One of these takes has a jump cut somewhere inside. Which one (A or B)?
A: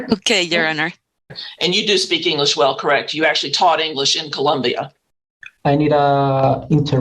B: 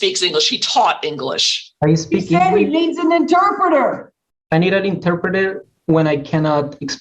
A